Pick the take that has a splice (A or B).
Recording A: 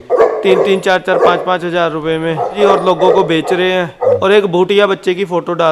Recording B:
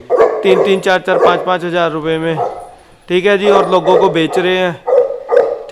A